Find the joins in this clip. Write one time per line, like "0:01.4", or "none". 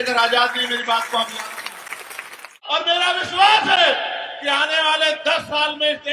0:02.5